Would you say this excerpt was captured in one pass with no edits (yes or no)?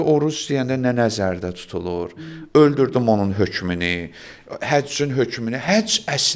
yes